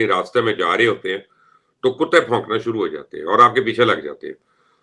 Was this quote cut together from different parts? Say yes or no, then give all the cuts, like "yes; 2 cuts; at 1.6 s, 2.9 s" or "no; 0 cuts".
no; 0 cuts